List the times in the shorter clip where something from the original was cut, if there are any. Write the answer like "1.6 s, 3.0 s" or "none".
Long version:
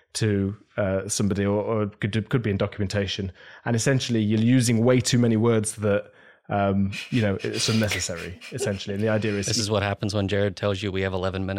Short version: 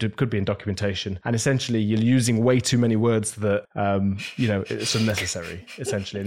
1.1 s, 3.7 s